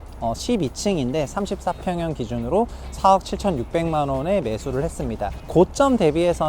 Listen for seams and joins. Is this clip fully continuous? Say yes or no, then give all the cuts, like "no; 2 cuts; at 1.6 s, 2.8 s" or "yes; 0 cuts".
no; 1 cut; at 5.4 s